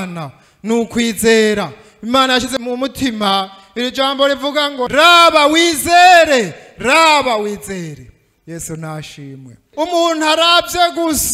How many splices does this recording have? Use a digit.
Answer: 2